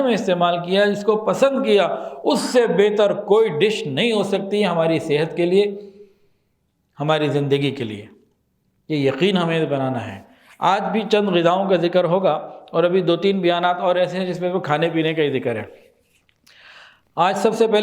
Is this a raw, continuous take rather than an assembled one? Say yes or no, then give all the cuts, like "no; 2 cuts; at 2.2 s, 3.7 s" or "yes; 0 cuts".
yes; 0 cuts